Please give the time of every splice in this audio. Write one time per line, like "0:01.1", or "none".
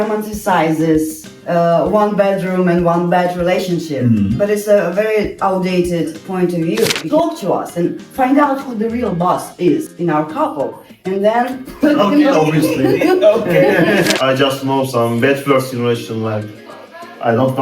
0:07.0
0:14.1